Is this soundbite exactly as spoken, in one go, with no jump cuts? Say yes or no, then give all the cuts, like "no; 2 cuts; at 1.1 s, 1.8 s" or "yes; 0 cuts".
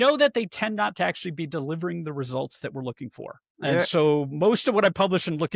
no; 1 cut; at 3.8 s